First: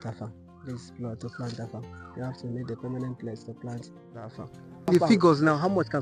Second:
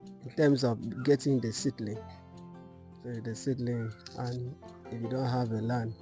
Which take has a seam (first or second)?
first